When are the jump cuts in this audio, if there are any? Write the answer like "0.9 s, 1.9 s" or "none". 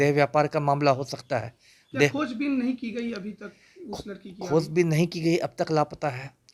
none